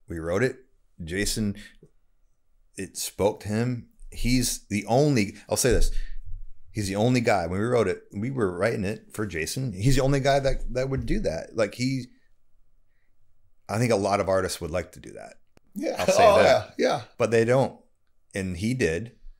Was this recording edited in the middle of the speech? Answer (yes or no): no